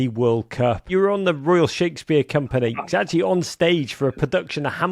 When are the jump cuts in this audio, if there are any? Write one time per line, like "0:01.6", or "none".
0:00.8
0:02.8